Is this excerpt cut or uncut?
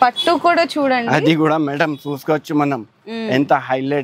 uncut